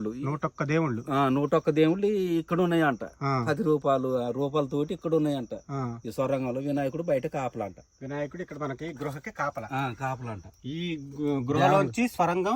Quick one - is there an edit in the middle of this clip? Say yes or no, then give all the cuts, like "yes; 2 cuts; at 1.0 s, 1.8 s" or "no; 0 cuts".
no; 0 cuts